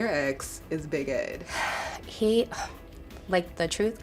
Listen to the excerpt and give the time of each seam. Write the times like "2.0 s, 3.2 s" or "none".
none